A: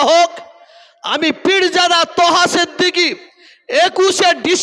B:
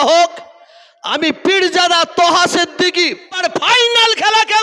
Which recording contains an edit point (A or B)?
B